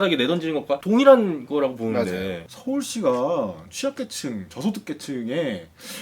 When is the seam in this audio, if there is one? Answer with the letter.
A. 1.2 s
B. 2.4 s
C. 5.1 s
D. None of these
D